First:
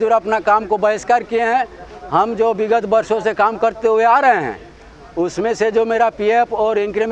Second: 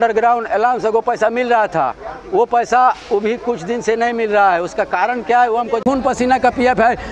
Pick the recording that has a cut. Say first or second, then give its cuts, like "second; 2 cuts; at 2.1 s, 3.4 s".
second; 1 cut; at 5.8 s